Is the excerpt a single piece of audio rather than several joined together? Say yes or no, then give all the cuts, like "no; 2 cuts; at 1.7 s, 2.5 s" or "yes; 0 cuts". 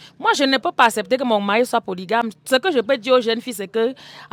yes; 0 cuts